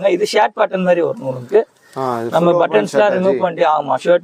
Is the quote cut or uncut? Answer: uncut